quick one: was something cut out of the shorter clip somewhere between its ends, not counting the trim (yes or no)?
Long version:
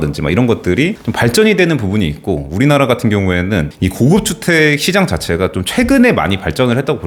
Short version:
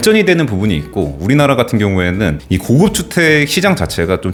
no